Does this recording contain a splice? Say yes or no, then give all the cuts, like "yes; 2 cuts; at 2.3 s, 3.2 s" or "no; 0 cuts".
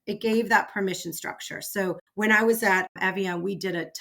yes; 2 cuts; at 2.1 s, 2.9 s